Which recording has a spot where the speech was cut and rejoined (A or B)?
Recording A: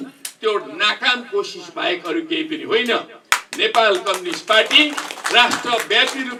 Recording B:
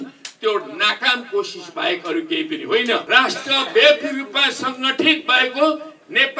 B